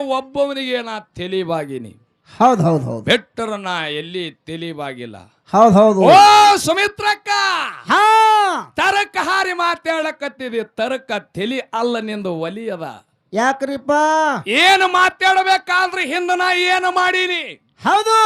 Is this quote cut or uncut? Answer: uncut